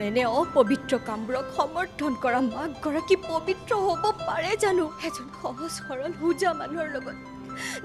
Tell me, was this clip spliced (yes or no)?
yes